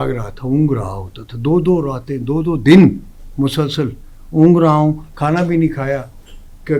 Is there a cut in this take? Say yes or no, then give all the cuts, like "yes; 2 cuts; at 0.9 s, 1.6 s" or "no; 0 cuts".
no; 0 cuts